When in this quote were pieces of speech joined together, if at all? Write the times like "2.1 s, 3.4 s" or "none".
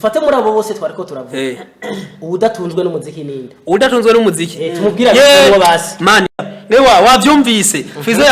6.3 s